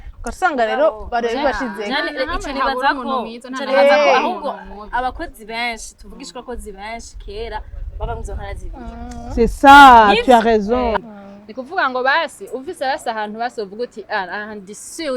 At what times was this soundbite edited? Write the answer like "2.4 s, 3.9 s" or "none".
11.0 s